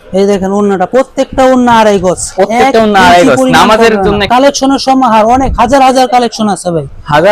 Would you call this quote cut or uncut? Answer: cut